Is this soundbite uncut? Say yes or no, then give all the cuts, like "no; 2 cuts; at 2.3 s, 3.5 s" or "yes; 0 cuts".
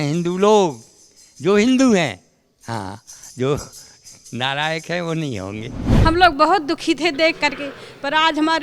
no; 1 cut; at 5.8 s